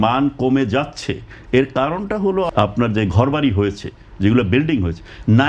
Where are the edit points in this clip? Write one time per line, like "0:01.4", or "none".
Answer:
0:02.5